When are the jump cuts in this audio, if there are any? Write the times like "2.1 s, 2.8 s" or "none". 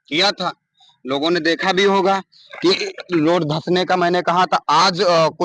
none